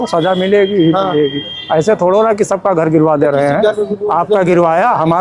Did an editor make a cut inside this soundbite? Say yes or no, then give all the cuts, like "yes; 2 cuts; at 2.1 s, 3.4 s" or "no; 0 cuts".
no; 0 cuts